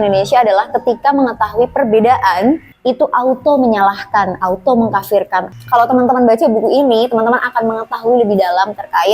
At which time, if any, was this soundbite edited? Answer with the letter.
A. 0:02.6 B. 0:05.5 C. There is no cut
B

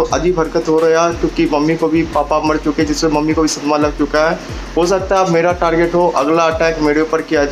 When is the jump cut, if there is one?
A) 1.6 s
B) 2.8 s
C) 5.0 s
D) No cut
D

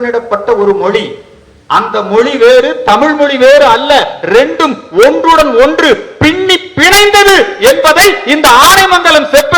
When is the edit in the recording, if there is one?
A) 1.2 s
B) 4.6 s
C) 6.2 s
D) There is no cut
D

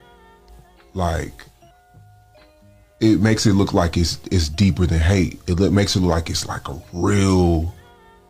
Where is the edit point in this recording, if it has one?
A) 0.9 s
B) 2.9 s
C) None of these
A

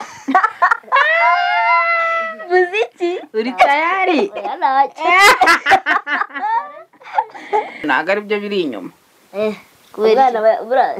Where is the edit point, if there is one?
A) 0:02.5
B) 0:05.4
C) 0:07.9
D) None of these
C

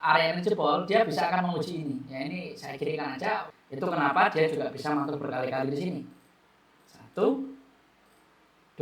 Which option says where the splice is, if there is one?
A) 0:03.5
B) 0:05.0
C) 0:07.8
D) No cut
A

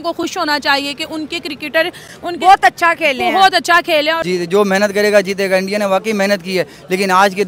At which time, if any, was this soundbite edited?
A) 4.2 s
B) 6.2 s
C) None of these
A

